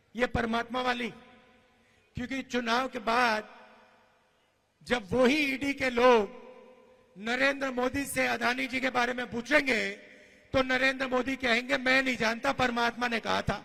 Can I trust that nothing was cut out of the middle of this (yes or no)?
yes